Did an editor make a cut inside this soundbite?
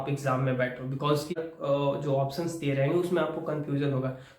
yes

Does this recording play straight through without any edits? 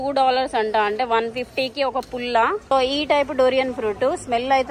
no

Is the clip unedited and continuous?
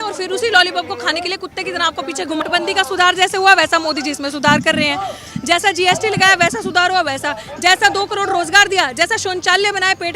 no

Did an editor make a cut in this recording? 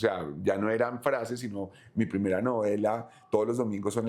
no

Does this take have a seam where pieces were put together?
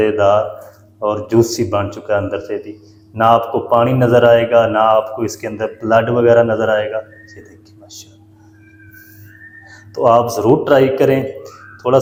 no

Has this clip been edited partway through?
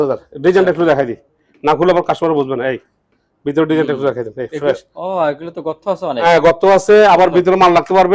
no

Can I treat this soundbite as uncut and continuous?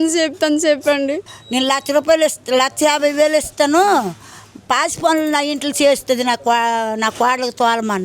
no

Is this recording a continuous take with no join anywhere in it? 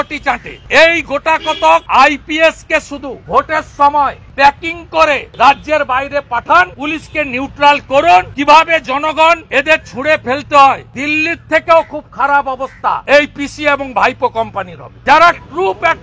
no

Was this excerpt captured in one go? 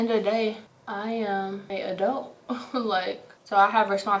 no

